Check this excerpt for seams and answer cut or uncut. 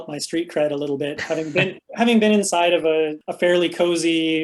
cut